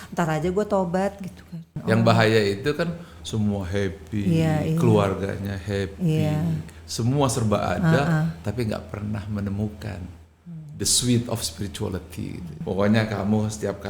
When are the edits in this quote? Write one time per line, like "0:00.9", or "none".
0:01.7
0:12.6